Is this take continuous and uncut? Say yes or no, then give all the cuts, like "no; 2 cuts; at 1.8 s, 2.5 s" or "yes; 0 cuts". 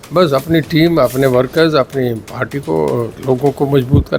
yes; 0 cuts